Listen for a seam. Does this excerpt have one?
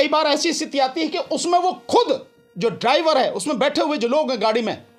no; 0 cuts

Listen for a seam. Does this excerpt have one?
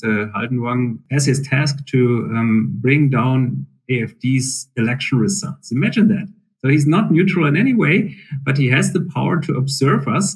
yes; 1 cut; at 1.0 s

